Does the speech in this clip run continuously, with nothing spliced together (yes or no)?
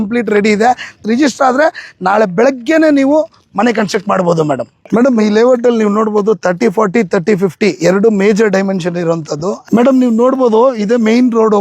no